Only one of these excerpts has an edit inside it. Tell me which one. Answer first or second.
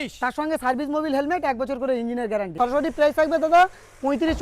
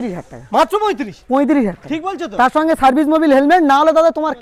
first